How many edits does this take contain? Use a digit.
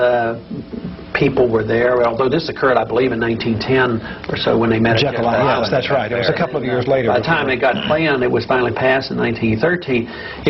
0